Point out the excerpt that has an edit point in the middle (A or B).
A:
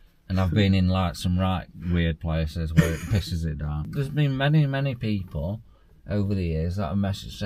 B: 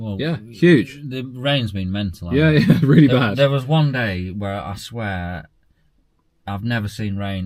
A